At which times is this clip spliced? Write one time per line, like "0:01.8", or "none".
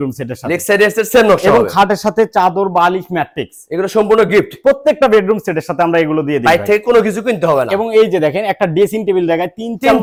none